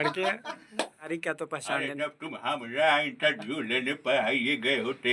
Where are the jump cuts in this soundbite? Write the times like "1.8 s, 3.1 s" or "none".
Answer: 1.1 s